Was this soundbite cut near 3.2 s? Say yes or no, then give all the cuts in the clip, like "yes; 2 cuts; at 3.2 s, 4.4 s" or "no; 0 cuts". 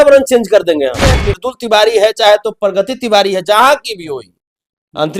no; 1 cut; at 1.3 s